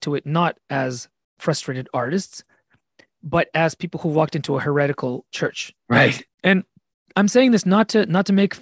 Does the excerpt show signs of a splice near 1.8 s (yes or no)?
no